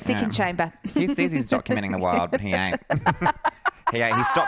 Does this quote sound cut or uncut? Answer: uncut